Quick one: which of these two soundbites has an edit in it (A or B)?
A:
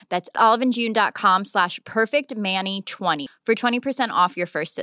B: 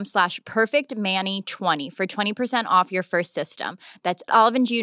B